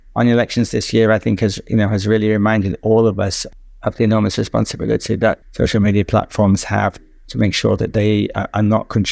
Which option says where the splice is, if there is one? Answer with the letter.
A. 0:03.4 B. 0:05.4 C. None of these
B